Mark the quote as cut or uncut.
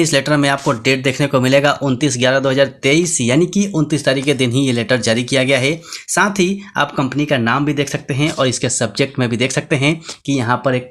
uncut